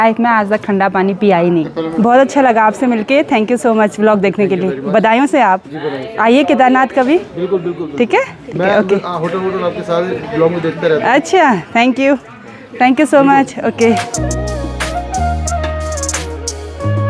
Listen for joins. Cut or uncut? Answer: uncut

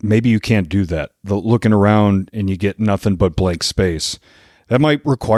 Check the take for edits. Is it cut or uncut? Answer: uncut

